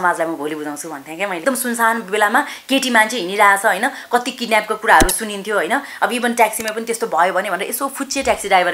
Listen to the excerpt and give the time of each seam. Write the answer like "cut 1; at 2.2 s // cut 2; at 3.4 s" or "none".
cut 1; at 1.4 s